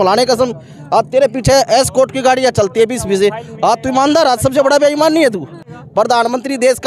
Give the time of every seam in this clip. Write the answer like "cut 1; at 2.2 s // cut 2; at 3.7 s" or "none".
cut 1; at 5.7 s